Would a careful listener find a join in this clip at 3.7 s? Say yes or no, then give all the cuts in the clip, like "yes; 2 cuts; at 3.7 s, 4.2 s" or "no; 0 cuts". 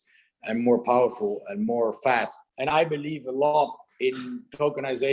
no; 1 cut; at 2.4 s